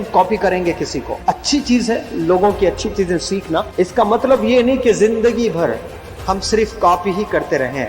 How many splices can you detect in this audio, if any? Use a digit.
2